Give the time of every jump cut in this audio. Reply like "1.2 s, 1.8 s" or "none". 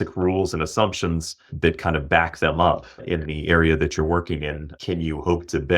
1.5 s, 3.0 s, 4.7 s